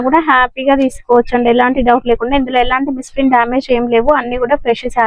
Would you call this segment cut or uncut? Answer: uncut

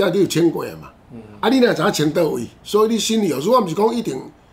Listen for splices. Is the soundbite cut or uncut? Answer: cut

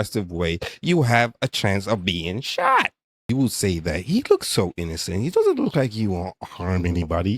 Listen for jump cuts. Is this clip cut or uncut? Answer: cut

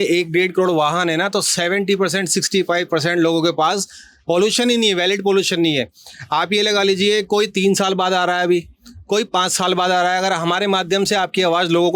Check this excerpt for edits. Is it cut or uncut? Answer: uncut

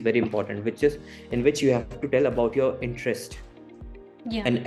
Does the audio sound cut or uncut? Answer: uncut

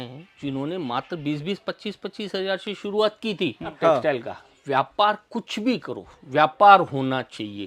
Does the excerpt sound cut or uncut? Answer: cut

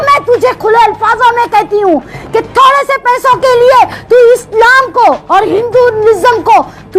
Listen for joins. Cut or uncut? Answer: uncut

